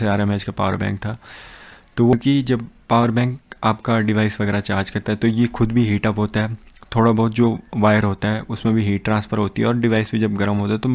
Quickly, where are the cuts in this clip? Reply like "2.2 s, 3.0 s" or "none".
2.1 s